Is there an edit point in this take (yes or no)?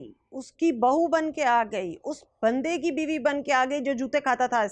no